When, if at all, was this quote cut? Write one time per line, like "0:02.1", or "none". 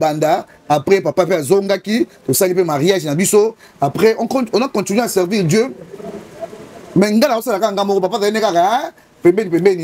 none